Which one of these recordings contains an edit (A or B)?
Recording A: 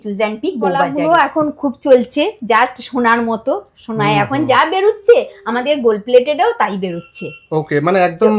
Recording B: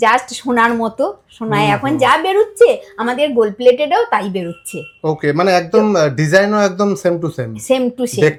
A